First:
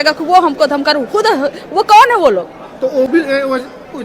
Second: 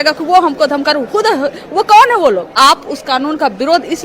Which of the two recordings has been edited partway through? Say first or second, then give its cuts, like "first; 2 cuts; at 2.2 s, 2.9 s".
second; 1 cut; at 2.6 s